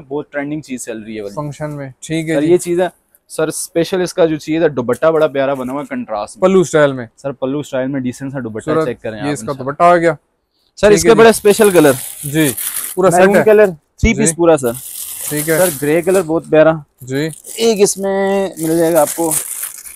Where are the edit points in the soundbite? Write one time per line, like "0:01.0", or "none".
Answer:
none